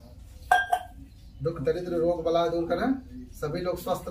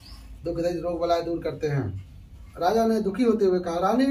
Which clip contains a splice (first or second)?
second